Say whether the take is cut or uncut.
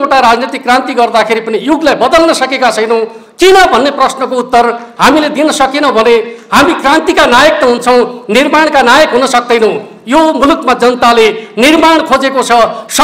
uncut